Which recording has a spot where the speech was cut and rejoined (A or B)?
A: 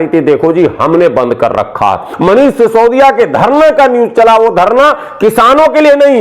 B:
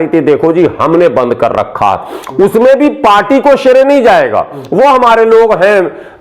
A